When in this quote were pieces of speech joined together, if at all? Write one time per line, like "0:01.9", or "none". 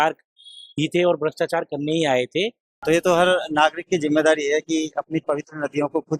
0:02.7